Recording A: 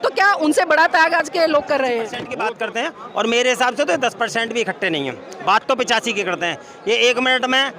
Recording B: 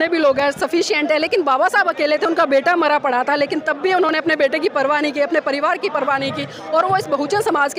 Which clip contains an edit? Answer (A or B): A